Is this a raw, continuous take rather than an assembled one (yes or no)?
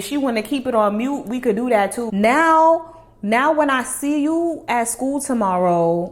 no